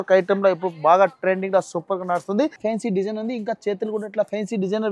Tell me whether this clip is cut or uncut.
cut